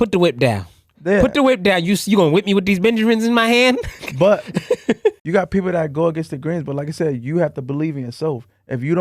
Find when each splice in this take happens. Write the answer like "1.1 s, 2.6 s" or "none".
5.2 s